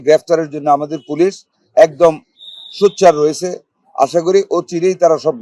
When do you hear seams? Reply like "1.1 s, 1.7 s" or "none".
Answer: none